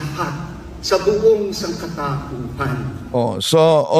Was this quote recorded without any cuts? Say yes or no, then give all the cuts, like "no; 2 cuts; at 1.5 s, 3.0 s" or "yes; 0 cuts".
yes; 0 cuts